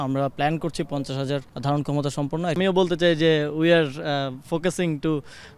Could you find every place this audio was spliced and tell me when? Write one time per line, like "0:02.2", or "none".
0:01.5
0:02.6